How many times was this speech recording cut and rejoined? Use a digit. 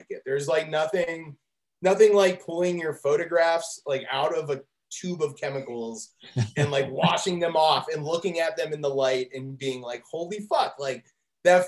0